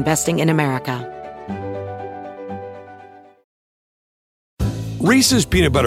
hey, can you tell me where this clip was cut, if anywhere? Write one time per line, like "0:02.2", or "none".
0:01.0